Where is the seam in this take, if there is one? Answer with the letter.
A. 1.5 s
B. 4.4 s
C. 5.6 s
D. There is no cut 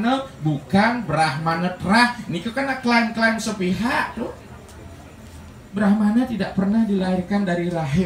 C